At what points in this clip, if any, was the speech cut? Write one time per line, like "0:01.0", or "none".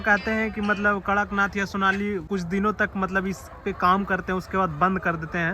0:02.2